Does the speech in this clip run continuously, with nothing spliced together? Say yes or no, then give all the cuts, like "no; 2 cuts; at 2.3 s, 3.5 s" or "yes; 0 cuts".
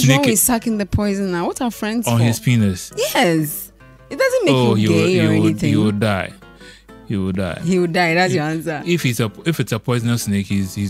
yes; 0 cuts